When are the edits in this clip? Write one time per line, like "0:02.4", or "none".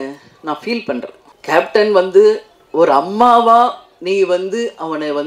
0:01.2